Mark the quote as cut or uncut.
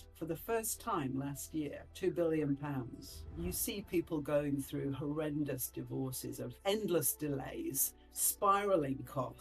cut